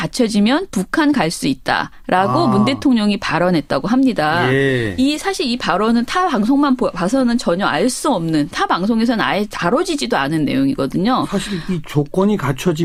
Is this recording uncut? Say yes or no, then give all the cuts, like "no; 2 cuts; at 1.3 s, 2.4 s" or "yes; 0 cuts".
yes; 0 cuts